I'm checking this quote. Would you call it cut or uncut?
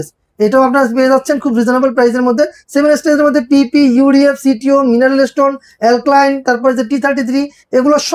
uncut